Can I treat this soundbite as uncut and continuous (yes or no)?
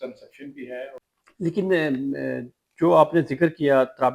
no